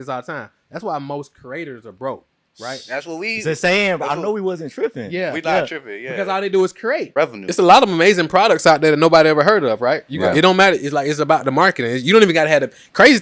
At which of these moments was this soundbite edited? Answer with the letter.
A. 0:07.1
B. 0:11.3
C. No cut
A